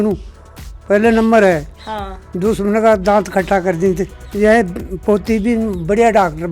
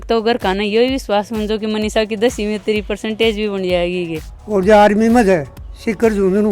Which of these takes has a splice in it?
second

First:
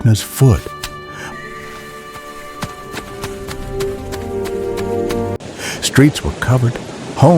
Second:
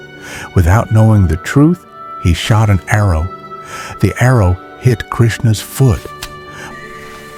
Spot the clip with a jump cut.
first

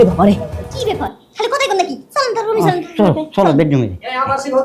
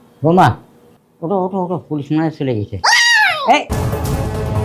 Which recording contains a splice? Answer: second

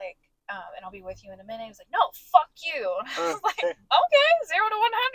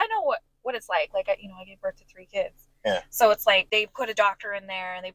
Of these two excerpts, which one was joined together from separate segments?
second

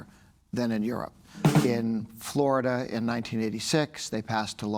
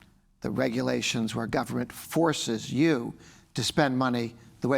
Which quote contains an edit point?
first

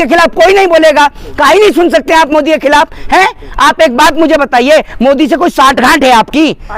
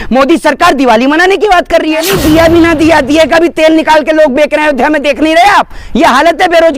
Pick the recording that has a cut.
second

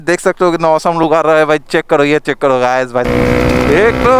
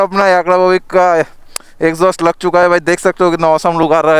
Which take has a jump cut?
first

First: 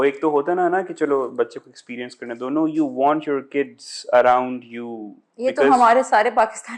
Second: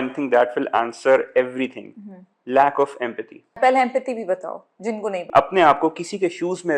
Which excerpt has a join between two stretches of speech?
second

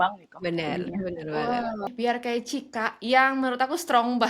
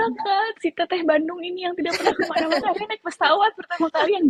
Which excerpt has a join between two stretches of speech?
first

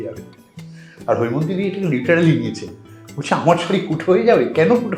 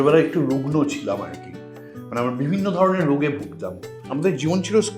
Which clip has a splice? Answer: second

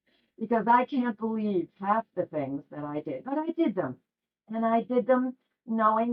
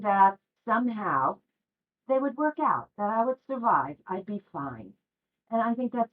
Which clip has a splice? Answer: second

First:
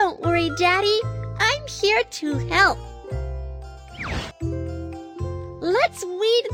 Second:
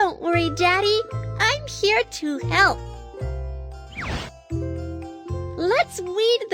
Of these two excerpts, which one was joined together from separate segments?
second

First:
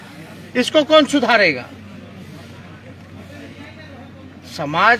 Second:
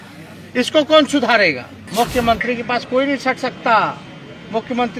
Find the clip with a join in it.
second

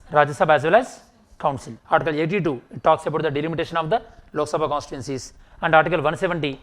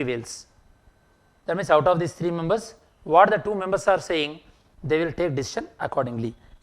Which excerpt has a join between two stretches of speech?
first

